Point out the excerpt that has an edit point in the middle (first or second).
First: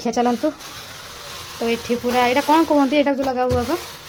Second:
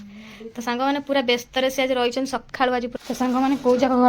second